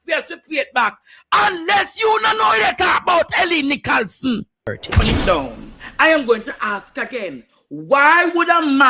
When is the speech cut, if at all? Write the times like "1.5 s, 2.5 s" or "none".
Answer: 5.0 s